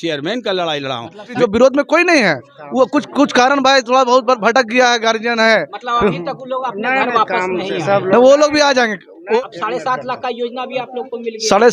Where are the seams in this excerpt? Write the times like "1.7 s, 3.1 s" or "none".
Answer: 1.3 s, 9.4 s